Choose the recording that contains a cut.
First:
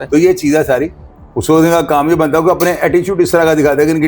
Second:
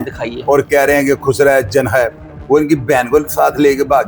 first; 1 cut; at 1.0 s

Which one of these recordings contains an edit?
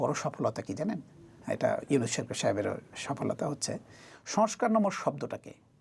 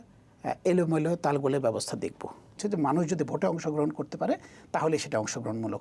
second; 1 cut; at 2.6 s

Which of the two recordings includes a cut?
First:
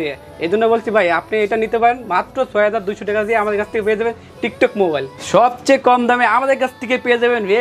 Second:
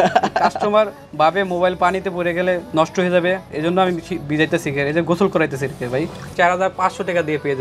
second; 2 cuts; at 2.7 s, 6.3 s

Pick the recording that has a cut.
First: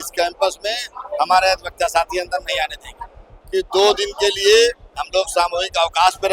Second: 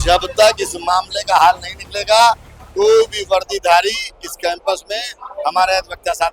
first; 1 cut; at 3.3 s

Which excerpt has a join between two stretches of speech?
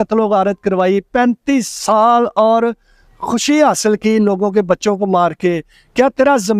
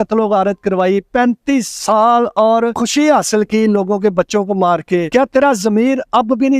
second; 2 cuts; at 2.8 s, 5.1 s

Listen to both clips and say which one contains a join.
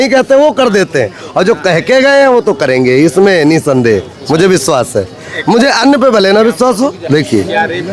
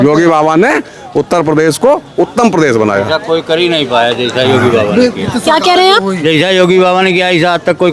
first; 1 cut; at 7.0 s

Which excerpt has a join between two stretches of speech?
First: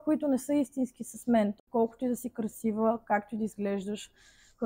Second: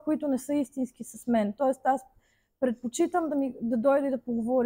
first; 1 cut; at 1.6 s

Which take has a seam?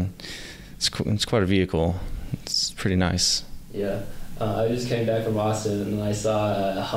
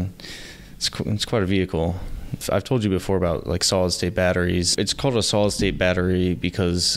second; 2 cuts; at 2.4 s, 4.7 s

